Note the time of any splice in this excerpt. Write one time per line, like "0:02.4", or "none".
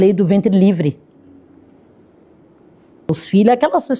none

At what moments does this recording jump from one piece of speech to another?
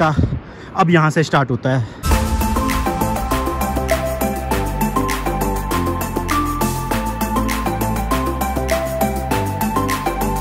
none

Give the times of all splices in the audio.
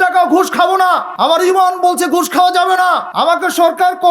0:01.1
0:03.1

